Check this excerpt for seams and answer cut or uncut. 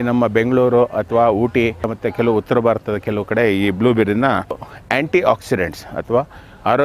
cut